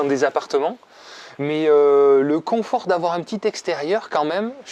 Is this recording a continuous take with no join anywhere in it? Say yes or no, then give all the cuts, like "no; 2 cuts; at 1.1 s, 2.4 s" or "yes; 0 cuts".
yes; 0 cuts